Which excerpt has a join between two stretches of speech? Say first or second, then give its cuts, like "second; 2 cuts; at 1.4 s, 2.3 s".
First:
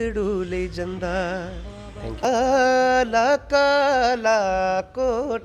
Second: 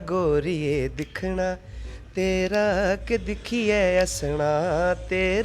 first; 1 cut; at 2.2 s